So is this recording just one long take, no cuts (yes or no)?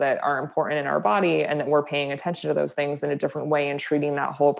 yes